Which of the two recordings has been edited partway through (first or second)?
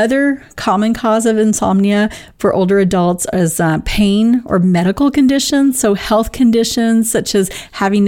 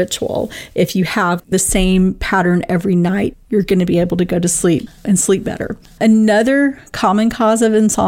second